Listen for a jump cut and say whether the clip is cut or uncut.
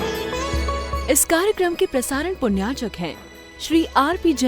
cut